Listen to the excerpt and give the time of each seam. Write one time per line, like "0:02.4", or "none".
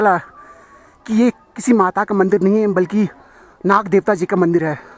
none